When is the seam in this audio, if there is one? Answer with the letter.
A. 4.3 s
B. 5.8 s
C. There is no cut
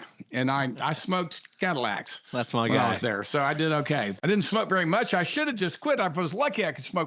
A